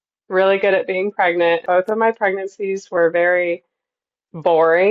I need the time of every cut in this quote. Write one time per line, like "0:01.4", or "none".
0:01.6

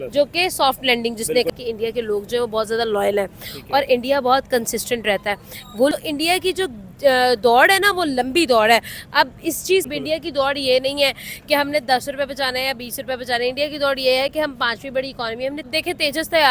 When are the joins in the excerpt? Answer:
0:01.5
0:05.9
0:09.9
0:15.7

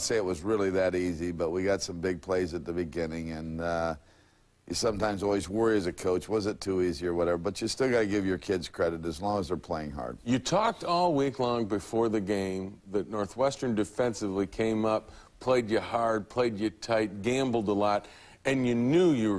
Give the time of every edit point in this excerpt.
none

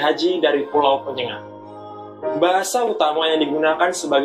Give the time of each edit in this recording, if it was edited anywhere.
none

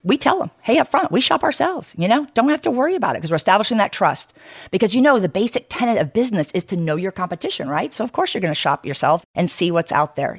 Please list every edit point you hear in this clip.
0:09.2

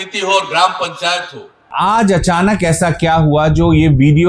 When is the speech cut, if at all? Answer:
0:01.7

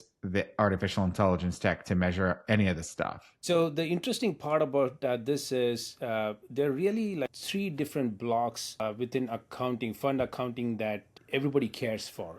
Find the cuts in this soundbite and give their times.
0:03.4
0:07.4
0:08.8
0:11.1

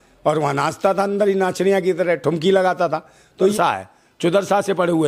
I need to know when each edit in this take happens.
0:03.5

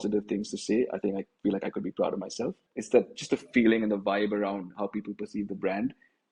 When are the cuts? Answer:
0:02.7

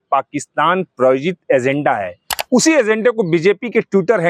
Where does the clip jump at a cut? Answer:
none

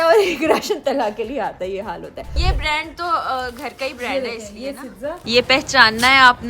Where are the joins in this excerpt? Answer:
0:02.3
0:05.2

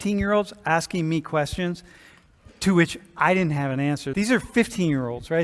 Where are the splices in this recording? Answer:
0:04.1

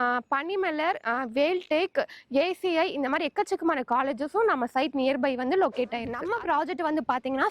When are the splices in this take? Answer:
0:06.1

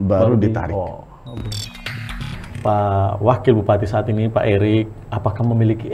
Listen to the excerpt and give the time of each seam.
0:02.1

